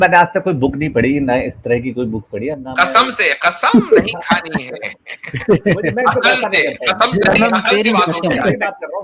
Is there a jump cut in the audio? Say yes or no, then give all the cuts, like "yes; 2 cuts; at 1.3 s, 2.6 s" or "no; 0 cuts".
no; 0 cuts